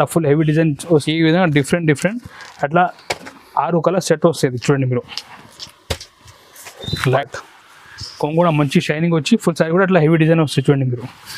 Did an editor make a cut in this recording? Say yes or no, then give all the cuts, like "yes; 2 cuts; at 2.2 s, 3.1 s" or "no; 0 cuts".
yes; 2 cuts; at 1.1 s, 7.2 s